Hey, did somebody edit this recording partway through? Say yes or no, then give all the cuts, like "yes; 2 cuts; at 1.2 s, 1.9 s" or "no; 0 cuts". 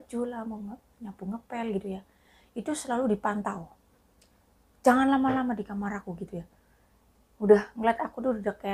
no; 0 cuts